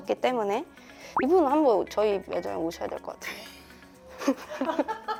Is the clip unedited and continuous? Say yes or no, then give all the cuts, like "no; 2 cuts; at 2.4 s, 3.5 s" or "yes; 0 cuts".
yes; 0 cuts